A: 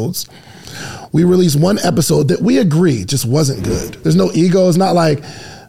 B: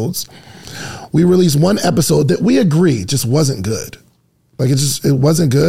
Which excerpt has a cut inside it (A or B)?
A